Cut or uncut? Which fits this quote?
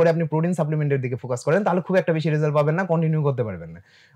uncut